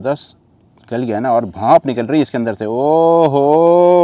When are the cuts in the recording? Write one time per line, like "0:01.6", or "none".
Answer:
none

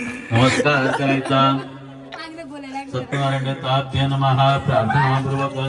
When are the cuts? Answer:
none

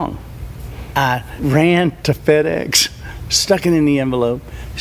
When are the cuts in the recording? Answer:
0:00.8
0:02.0

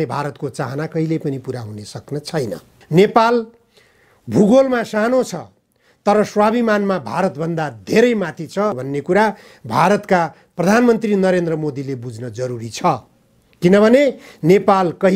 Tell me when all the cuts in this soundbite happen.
0:02.7

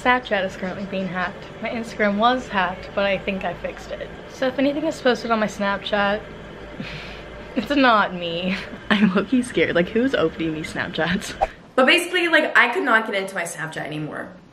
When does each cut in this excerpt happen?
none

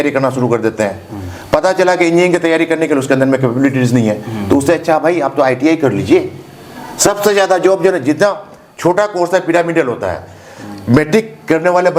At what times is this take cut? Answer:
none

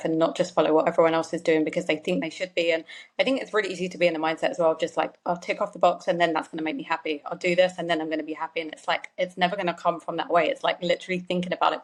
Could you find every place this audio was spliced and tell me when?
none

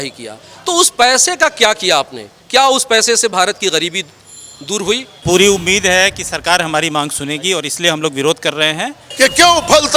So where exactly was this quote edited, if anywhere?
0:05.2
0:09.0

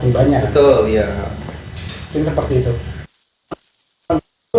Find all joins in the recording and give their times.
none

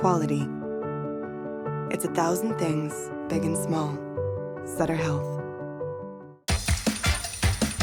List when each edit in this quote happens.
none

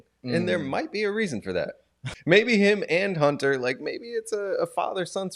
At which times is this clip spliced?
0:02.1

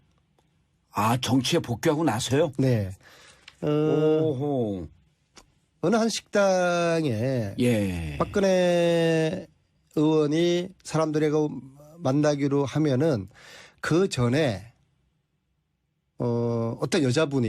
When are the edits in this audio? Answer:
0:02.3

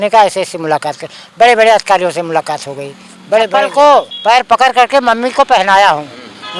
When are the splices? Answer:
0:03.6

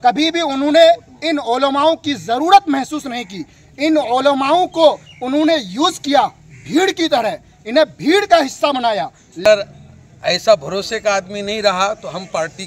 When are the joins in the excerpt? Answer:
0:09.4

